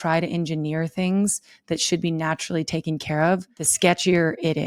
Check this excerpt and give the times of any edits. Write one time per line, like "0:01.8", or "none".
0:03.6

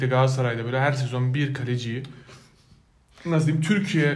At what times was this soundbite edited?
none

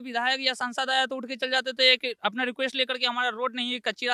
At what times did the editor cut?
none

